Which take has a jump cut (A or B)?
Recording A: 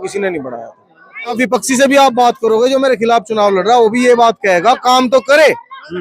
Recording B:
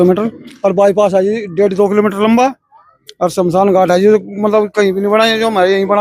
A